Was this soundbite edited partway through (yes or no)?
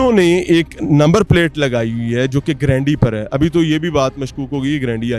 no